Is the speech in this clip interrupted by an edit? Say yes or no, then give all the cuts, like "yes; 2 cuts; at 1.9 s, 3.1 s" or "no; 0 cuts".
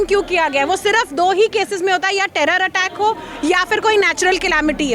no; 0 cuts